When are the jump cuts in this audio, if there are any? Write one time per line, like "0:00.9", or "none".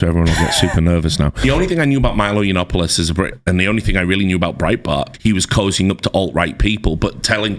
0:01.4
0:03.3
0:05.1